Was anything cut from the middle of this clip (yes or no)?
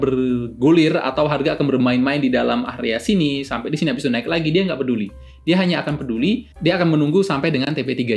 no